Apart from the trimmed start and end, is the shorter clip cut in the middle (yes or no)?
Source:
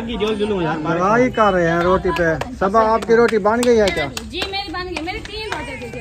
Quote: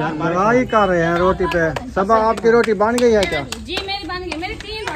no